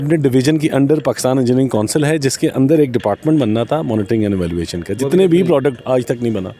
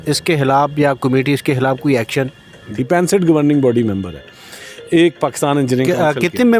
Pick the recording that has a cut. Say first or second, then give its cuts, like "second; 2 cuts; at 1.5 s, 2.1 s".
second; 1 cut; at 2.6 s